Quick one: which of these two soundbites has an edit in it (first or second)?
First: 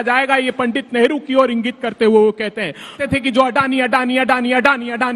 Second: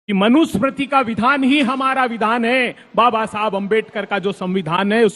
first